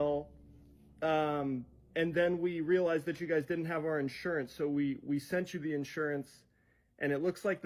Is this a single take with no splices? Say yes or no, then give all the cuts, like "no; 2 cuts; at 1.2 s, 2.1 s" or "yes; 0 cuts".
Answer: yes; 0 cuts